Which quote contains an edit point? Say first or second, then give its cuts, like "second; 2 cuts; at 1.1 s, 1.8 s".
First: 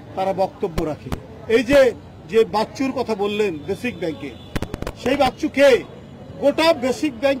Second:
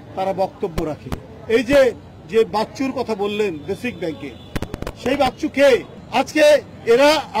second; 1 cut; at 6.0 s